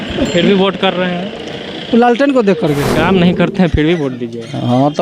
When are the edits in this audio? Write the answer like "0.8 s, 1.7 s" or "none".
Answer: 2.9 s